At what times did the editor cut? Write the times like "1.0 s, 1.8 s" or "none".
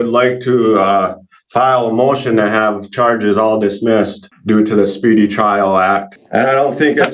4.3 s, 6.2 s